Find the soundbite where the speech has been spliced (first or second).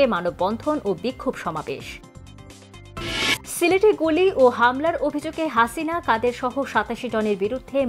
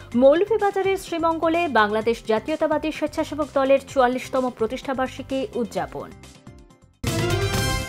second